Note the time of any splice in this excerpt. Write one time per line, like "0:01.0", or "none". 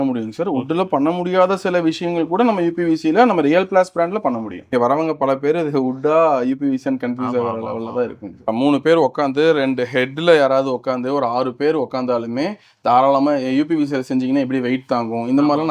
0:04.6
0:08.5